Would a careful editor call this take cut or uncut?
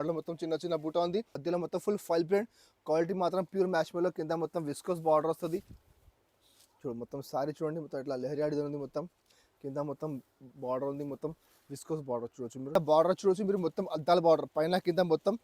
cut